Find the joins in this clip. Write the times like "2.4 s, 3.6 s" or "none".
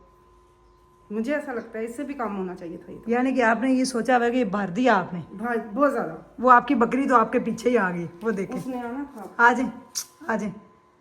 none